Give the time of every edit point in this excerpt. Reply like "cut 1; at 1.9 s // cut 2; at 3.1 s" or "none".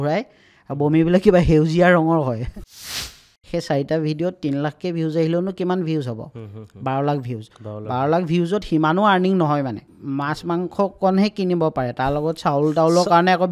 cut 1; at 2.9 s // cut 2; at 9.9 s